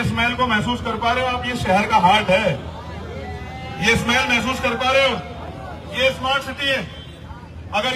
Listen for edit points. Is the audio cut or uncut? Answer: uncut